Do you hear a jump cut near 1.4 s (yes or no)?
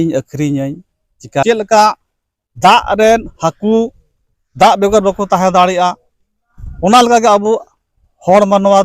yes